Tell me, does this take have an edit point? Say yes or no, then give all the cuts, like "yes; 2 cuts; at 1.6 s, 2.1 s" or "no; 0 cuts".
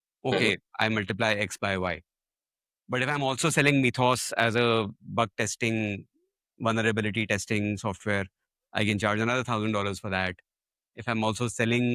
no; 0 cuts